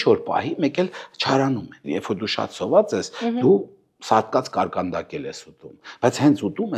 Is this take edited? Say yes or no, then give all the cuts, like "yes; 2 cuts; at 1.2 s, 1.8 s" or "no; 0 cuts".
yes; 1 cut; at 1.7 s